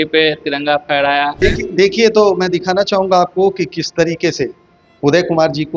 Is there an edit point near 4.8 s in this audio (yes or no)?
no